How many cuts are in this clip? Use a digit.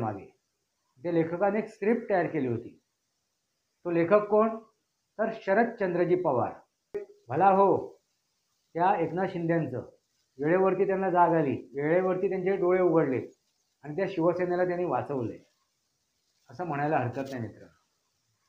1